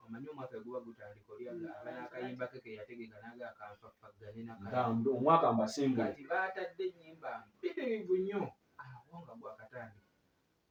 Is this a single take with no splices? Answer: yes; 0 cuts

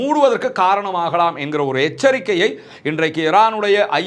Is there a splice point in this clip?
no; 0 cuts

